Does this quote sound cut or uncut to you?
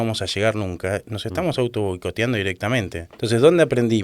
cut